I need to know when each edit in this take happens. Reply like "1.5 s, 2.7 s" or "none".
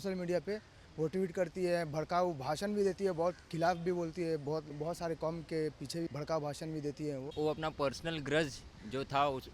4.8 s, 6.1 s, 7.3 s